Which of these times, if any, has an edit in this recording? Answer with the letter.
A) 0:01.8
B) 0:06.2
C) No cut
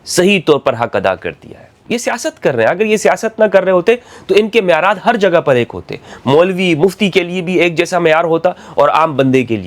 A